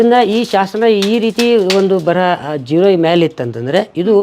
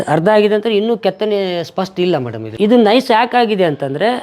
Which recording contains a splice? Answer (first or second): second